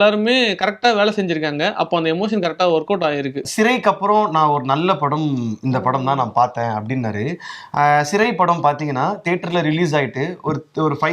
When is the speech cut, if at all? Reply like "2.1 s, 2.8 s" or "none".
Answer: 3.5 s